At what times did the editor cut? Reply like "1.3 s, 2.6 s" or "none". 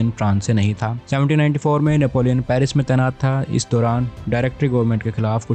0.9 s